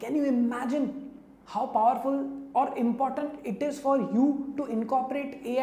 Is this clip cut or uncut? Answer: uncut